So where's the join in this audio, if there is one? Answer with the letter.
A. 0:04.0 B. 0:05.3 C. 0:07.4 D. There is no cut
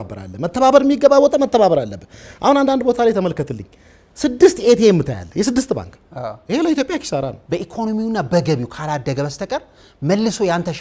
C